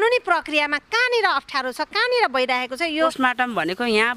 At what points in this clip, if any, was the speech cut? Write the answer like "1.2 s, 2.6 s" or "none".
3.1 s